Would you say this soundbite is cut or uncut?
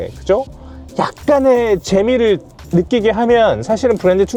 uncut